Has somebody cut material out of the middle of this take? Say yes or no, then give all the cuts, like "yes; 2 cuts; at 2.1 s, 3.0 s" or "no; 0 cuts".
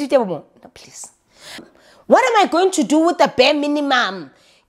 yes; 1 cut; at 1.6 s